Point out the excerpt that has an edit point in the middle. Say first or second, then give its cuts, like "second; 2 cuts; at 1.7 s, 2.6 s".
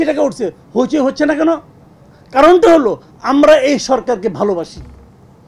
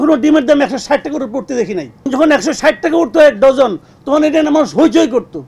second; 1 cut; at 2.1 s